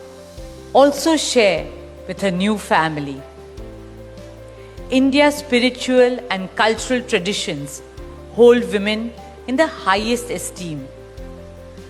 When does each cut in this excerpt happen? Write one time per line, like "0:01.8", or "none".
none